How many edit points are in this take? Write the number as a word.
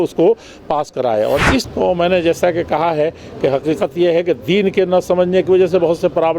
one